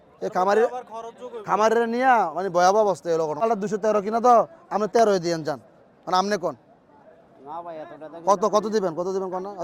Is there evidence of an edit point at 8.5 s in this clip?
no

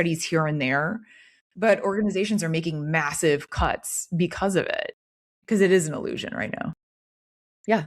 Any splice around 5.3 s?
yes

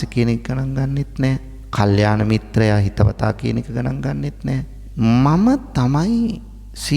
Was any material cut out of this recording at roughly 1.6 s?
yes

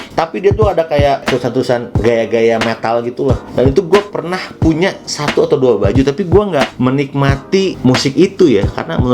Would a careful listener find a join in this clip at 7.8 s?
yes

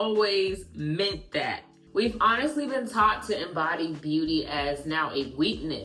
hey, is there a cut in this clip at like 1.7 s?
yes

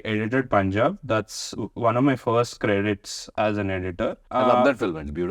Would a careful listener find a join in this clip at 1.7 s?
no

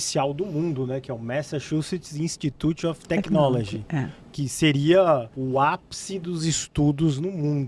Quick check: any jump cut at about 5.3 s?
yes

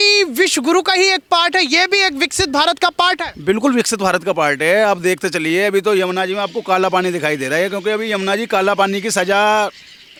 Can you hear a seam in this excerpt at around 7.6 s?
no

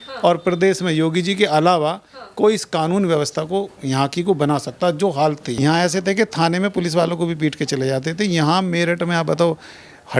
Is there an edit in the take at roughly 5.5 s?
yes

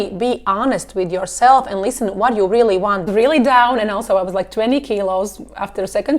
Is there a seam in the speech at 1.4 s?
no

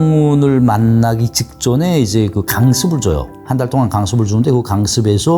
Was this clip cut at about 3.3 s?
yes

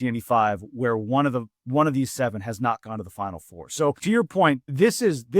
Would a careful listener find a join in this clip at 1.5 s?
no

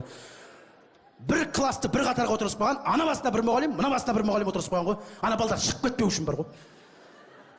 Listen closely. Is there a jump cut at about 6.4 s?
yes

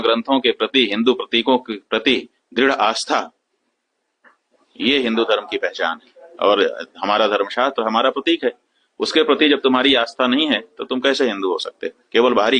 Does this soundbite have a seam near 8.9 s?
no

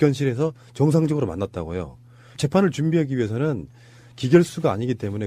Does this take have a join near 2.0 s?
yes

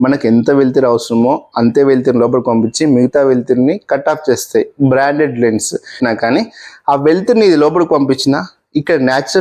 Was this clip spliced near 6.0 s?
yes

